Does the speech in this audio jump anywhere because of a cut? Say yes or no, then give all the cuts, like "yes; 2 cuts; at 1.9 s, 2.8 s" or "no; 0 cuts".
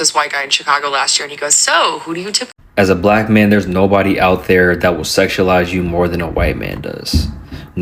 yes; 1 cut; at 2.6 s